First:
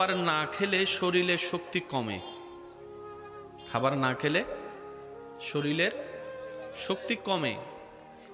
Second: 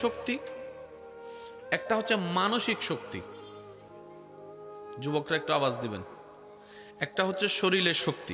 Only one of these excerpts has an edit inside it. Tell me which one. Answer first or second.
first